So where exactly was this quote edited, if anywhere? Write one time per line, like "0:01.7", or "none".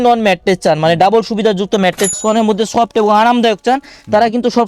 0:02.1